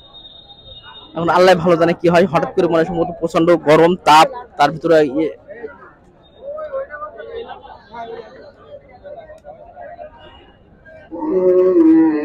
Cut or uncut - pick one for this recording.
uncut